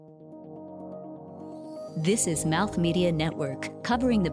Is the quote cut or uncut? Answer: uncut